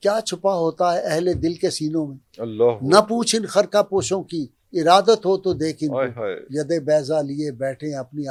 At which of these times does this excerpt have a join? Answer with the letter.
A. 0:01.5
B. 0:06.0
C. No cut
C